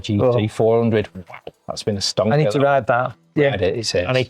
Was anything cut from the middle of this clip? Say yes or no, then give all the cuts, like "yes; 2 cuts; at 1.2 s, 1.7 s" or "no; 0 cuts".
no; 0 cuts